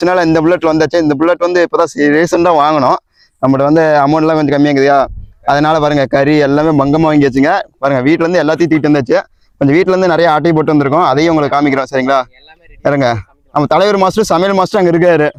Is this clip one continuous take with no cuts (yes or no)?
yes